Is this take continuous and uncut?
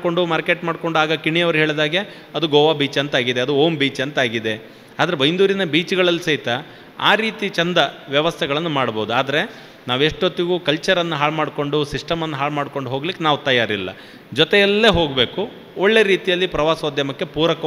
yes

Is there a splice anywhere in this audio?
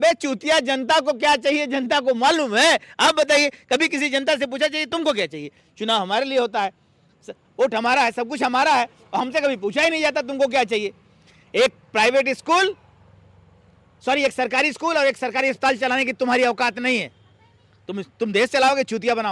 no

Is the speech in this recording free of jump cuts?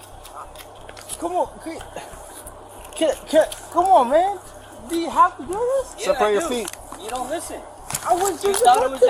no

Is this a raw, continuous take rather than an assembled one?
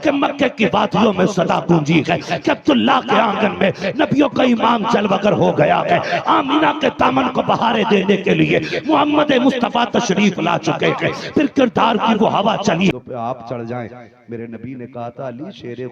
no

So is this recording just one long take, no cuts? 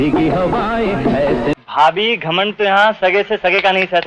no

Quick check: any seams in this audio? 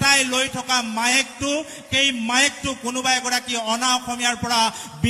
no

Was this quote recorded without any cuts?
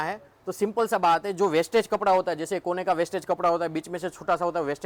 yes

